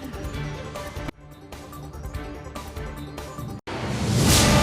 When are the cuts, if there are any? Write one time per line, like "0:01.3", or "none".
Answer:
0:03.6